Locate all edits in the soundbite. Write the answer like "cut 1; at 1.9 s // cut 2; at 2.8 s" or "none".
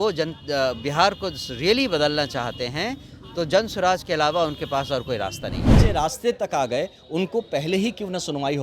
cut 1; at 5.9 s